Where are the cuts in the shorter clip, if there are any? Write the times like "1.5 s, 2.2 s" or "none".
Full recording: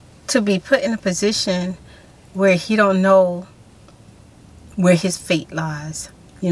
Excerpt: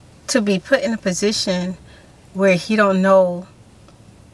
none